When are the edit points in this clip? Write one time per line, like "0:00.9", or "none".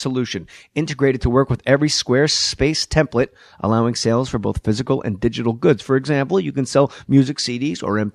none